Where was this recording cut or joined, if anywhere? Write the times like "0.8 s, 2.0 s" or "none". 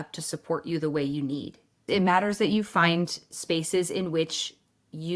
1.8 s